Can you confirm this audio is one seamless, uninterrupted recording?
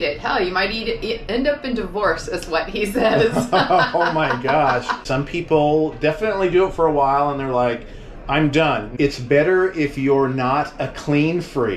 no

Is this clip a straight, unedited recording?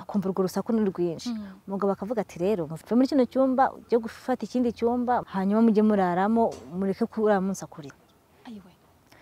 no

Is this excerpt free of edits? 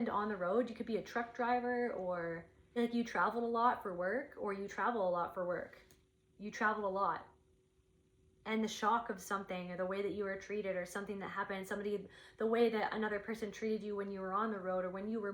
no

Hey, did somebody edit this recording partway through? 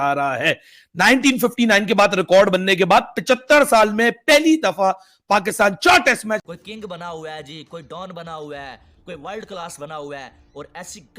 yes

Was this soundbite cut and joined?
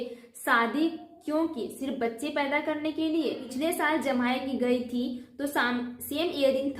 yes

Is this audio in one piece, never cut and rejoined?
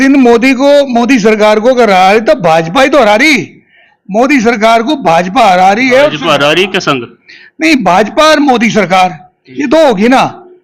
yes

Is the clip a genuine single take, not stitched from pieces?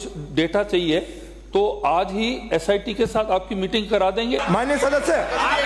no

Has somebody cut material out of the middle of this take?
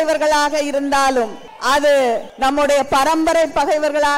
yes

